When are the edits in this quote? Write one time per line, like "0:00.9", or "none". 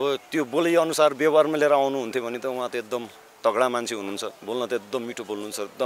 none